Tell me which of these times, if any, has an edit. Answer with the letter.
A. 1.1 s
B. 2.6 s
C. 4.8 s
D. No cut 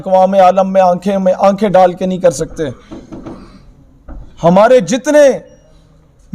D